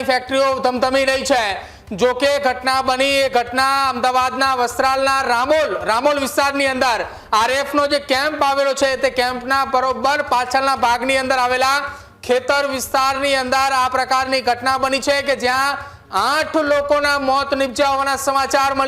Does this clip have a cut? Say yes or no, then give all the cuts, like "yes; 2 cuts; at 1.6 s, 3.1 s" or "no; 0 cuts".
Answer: no; 0 cuts